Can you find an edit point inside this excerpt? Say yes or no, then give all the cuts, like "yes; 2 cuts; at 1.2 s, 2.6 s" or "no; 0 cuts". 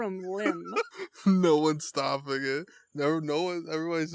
yes; 1 cut; at 1.0 s